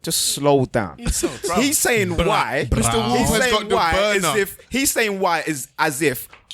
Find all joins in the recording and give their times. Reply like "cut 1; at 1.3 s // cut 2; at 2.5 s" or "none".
none

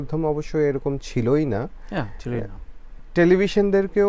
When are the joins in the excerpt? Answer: none

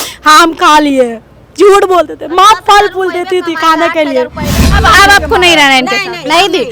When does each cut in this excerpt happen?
cut 1; at 4.8 s

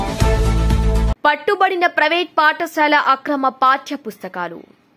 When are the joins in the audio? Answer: cut 1; at 1.1 s

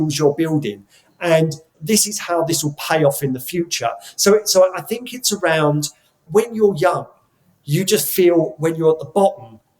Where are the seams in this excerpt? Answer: cut 1; at 1.7 s // cut 2; at 6.2 s

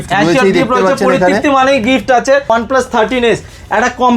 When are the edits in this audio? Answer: cut 1; at 2.5 s

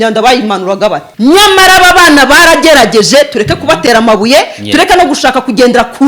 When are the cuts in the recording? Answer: cut 1; at 1.1 s

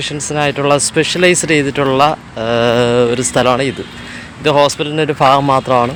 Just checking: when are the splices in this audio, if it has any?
none

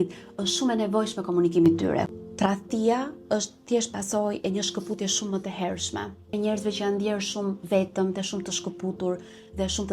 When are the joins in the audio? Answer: cut 1; at 2.1 s // cut 2; at 6.3 s

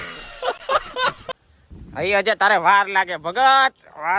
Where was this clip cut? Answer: cut 1; at 1.2 s

